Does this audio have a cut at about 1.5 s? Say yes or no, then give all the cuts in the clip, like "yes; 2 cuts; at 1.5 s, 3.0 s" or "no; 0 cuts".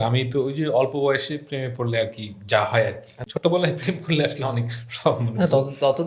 no; 1 cut; at 3.2 s